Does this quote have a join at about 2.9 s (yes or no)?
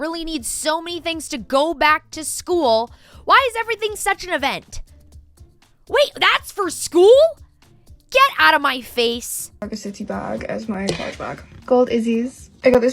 no